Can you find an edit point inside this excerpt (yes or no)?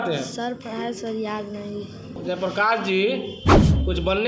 yes